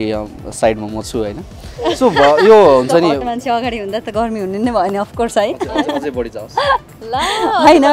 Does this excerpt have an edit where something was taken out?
no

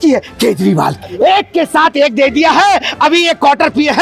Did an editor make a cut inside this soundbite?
yes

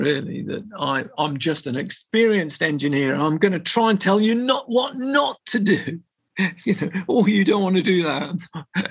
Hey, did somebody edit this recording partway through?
no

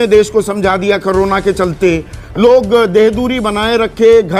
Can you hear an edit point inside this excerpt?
no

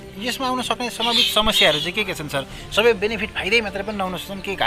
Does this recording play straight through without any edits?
yes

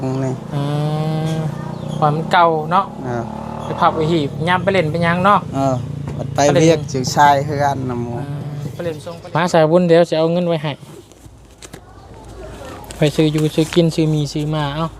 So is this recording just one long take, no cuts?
no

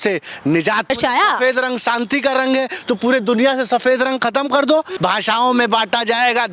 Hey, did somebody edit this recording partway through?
yes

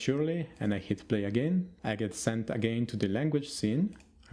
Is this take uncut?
no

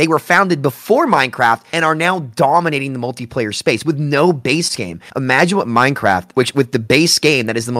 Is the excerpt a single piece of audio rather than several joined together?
yes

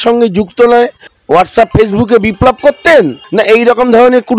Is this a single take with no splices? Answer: no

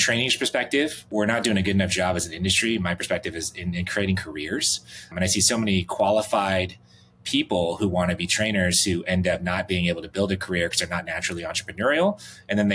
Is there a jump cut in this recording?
yes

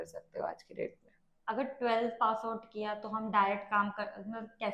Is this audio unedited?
yes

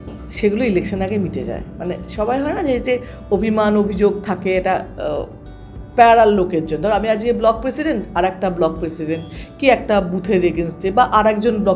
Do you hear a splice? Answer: no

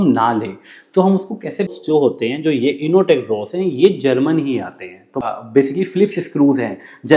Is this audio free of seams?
no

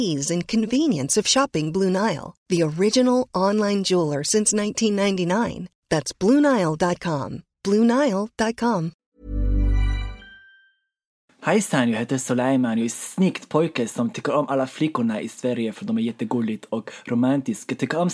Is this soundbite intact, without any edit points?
no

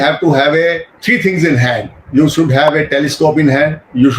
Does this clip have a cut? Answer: yes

